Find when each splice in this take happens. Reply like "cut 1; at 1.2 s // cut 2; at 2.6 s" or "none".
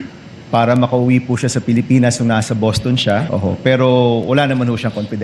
cut 1; at 3.3 s